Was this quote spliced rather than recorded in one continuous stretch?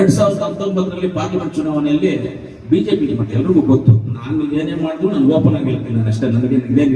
no; 0 cuts

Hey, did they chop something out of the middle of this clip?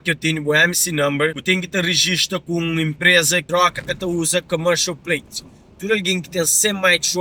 yes; 2 cuts; at 1.4 s, 3.4 s

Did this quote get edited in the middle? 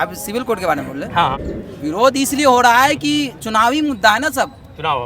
yes; 1 cut; at 1.5 s

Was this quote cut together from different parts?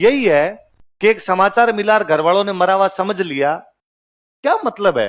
no; 0 cuts

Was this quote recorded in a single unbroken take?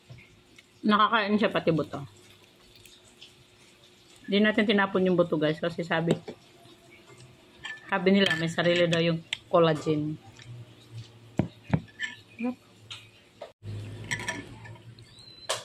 no; 1 cut; at 13.6 s

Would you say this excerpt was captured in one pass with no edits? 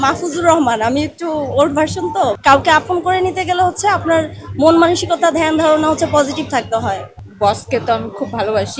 no; 2 cuts; at 2.4 s, 7.1 s

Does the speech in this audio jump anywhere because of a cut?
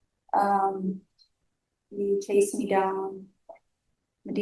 no; 0 cuts

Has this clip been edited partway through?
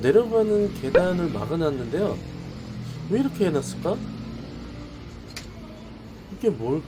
no; 0 cuts

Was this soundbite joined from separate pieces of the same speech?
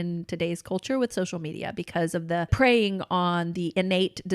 yes; 1 cut; at 2.5 s

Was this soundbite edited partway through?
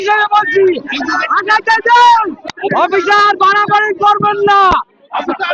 yes; 1 cut; at 2.4 s

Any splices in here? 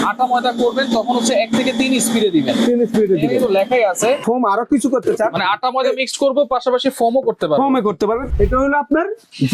yes; 2 cuts; at 4.2 s, 8.3 s

